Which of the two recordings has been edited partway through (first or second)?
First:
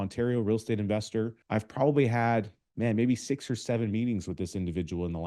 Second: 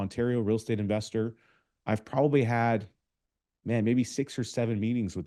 first